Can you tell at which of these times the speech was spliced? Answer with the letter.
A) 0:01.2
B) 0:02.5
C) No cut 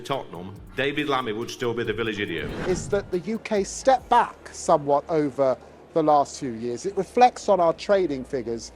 B